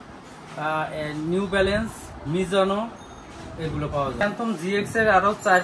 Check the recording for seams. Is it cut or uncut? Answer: cut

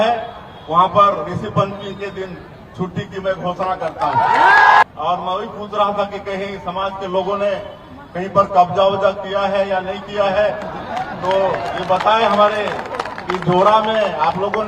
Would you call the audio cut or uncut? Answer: cut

